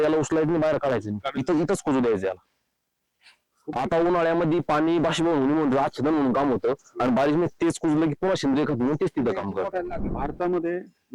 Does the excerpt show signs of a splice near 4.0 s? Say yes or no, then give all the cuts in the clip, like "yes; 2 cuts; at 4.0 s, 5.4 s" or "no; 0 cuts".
no; 1 cut; at 10.0 s